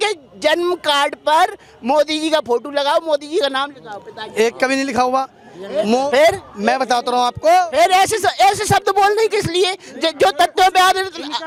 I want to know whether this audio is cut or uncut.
uncut